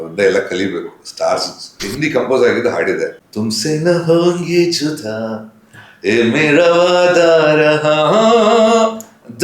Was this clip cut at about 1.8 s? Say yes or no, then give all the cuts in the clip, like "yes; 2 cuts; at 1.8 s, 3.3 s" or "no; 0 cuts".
yes; 2 cuts; at 1.8 s, 3.1 s